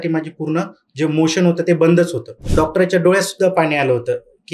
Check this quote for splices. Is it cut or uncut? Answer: cut